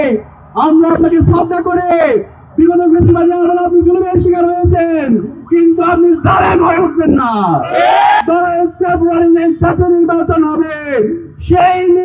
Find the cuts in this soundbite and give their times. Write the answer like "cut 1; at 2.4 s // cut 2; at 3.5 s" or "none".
cut 1; at 8.2 s